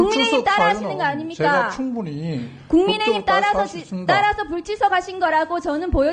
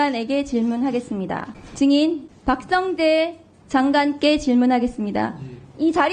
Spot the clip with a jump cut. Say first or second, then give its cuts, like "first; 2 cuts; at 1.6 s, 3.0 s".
second; 2 cuts; at 1.6 s, 2.3 s